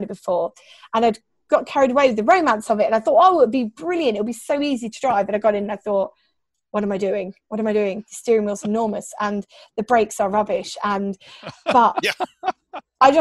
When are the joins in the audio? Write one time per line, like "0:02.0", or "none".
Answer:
none